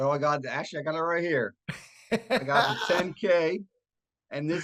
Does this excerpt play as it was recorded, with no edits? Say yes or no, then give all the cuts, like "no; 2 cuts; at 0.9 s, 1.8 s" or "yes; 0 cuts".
yes; 0 cuts